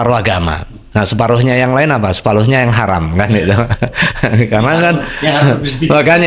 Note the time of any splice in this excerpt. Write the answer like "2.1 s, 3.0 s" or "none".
none